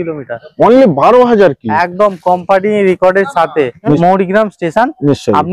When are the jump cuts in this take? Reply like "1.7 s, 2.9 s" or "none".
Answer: 4.0 s